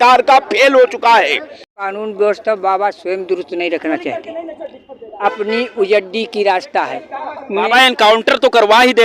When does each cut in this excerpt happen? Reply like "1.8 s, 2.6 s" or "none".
1.7 s